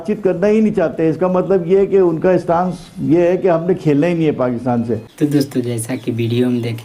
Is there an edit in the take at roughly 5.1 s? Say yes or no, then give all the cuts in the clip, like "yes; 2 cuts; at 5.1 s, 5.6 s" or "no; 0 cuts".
yes; 1 cut; at 5.1 s